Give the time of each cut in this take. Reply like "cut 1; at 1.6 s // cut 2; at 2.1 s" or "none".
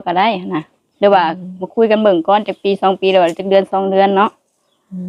none